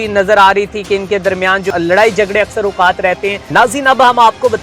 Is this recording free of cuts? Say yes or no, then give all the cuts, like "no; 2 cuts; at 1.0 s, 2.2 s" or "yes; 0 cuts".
no; 2 cuts; at 1.7 s, 3.4 s